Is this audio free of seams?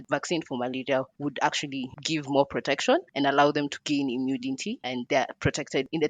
no; 4 cuts; at 1.1 s, 2.0 s, 3.8 s, 5.0 s

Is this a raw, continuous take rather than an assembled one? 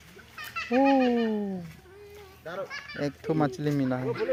yes; 0 cuts

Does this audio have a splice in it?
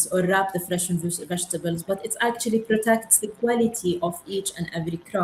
no; 0 cuts

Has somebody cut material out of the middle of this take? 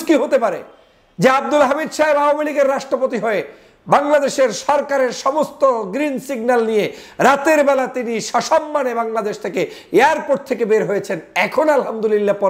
no; 0 cuts

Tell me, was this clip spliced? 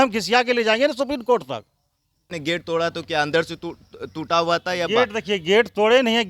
yes; 1 cut; at 2.3 s

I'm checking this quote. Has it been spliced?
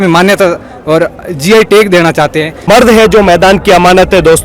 yes; 1 cut; at 2.6 s

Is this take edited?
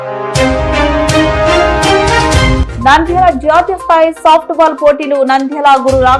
no; 0 cuts

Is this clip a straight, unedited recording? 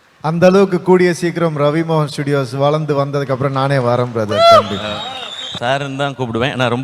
no; 1 cut; at 5.5 s

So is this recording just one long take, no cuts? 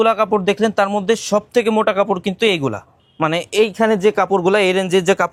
yes; 0 cuts

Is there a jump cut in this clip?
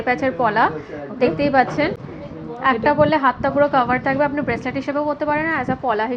no; 0 cuts

